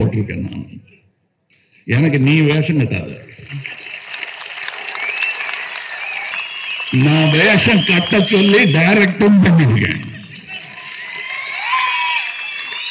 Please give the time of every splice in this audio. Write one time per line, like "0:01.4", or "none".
0:06.3